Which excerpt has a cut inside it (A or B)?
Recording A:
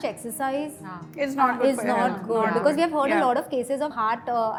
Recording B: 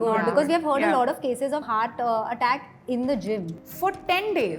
B